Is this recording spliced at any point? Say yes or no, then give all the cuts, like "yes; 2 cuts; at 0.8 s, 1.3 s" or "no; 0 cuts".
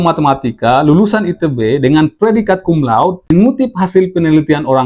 yes; 1 cut; at 3.3 s